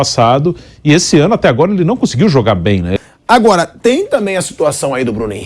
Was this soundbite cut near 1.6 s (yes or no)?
no